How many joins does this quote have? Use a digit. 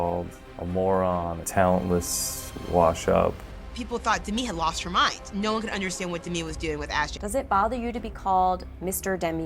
2